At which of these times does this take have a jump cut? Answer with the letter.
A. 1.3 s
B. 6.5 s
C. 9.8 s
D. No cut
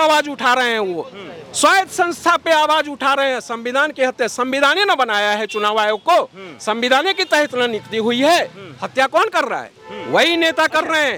D